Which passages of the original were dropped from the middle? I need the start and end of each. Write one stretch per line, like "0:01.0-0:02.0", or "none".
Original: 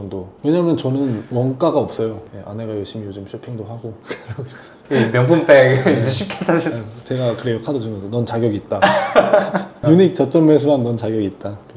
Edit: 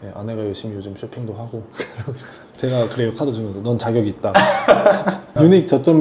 0:04.7-0:06.9